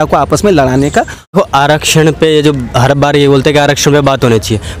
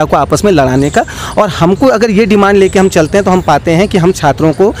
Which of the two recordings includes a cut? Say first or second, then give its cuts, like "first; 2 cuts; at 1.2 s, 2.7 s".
first; 1 cut; at 1.3 s